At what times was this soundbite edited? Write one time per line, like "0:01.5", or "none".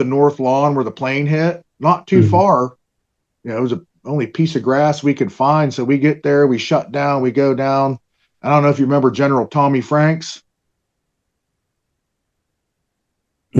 none